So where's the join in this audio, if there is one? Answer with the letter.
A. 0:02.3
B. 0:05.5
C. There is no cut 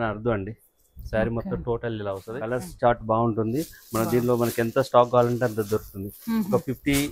A